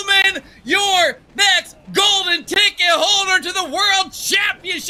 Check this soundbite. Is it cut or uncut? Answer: uncut